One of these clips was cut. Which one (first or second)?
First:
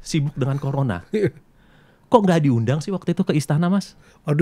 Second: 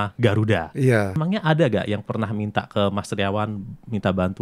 second